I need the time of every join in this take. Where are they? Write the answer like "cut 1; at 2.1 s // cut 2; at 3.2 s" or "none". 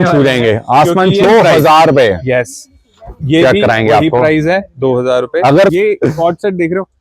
cut 1; at 1.2 s // cut 2; at 5.7 s